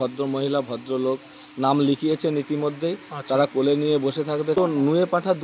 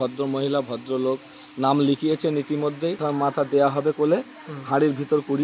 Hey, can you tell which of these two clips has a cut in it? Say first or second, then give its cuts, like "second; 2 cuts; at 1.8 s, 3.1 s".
second; 1 cut; at 3.0 s